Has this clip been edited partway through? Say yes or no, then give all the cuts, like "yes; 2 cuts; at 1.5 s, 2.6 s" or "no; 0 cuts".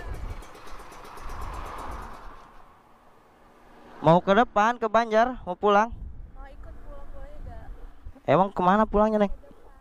no; 0 cuts